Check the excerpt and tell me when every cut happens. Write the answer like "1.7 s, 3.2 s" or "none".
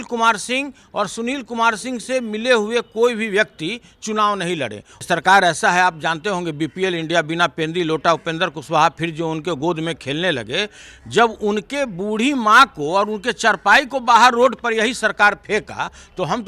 4.9 s

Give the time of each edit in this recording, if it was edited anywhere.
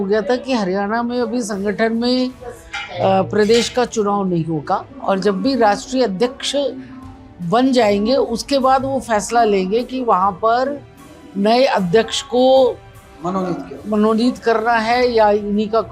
none

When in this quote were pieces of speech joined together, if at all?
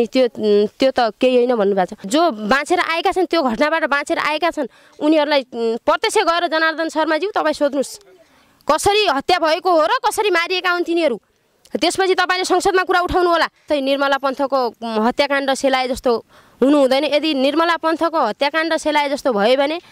2.1 s, 13.7 s

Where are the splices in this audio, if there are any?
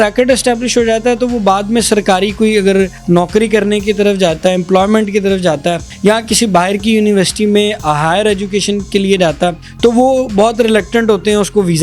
3.0 s, 5.9 s, 9.6 s

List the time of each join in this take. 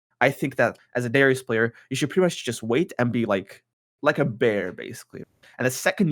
0.8 s, 5.2 s

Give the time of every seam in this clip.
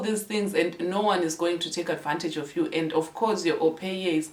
none

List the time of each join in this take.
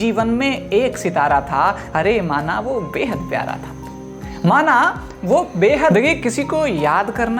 5.9 s

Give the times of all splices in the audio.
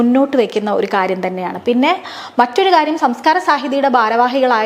none

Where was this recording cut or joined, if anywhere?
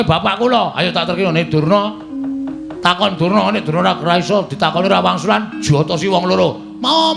none

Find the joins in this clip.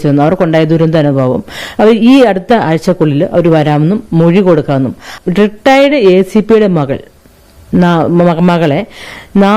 5.1 s

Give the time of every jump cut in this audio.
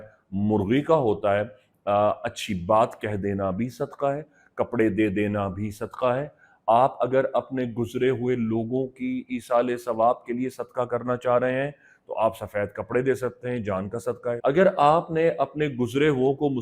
14.3 s

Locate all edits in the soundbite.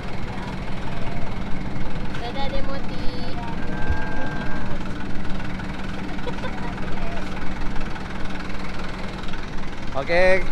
none

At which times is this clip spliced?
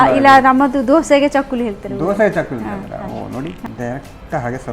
3.6 s

